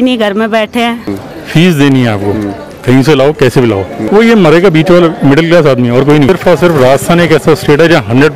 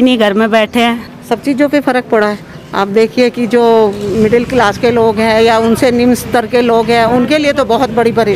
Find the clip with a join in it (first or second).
first